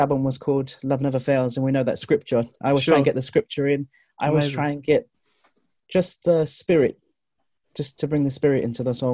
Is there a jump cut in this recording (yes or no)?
no